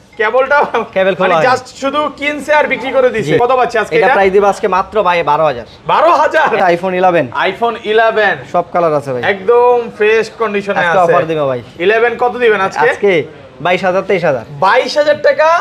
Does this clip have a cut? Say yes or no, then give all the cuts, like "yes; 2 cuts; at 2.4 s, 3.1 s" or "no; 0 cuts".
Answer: yes; 2 cuts; at 3.4 s, 6.6 s